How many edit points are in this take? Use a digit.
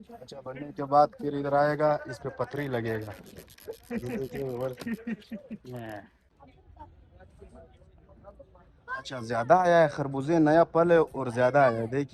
1